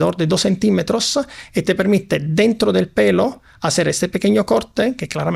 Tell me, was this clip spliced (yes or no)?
no